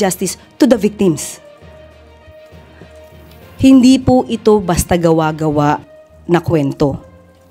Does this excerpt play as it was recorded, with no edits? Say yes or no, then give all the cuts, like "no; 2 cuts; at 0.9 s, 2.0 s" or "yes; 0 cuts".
no; 2 cuts; at 1.3 s, 3.1 s